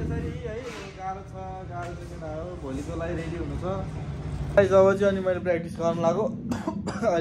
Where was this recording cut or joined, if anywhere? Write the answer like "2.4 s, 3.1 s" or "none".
4.6 s